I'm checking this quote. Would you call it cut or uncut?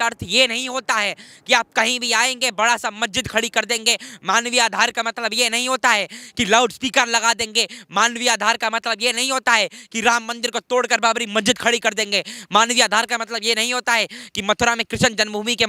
uncut